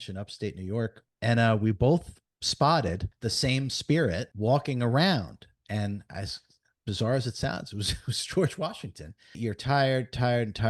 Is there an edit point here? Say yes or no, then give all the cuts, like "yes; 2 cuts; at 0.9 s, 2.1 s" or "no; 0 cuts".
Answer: yes; 4 cuts; at 1.1 s, 3.1 s, 4.3 s, 9.4 s